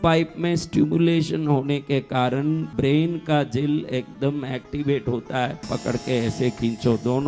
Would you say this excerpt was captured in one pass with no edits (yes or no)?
no